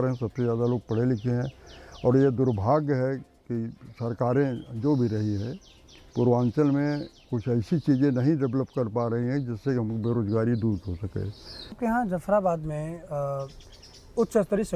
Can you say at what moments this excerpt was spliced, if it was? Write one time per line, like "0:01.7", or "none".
0:11.8

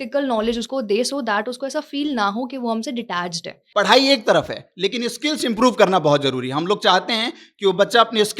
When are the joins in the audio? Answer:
0:03.6

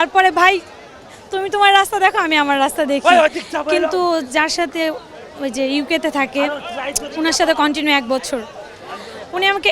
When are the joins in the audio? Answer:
none

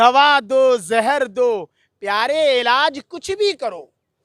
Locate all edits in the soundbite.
none

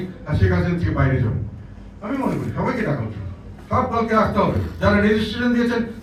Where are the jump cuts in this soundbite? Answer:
none

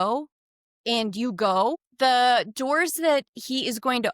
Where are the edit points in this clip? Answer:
0:01.9

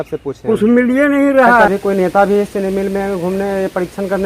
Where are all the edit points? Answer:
0:01.7

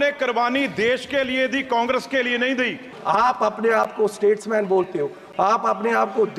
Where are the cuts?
0:02.9

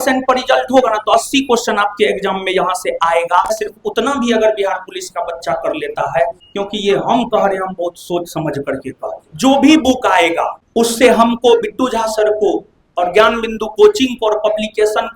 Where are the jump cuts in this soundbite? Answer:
0:03.6
0:06.4
0:09.2

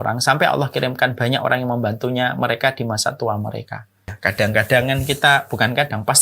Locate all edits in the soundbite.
0:04.1

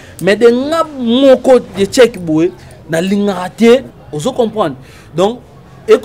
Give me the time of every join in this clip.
0:03.9

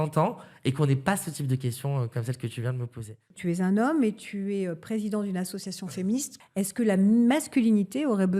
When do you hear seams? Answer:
0:03.3
0:06.4

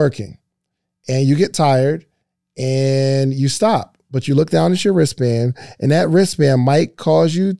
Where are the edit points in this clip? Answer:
none

